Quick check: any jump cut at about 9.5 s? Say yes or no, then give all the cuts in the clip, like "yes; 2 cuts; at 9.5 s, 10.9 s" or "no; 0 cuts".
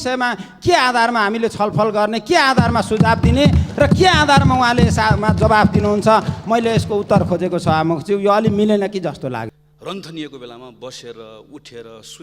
yes; 1 cut; at 9.5 s